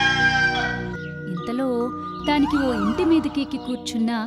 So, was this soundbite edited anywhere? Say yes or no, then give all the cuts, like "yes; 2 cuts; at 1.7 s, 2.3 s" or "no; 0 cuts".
yes; 1 cut; at 1.0 s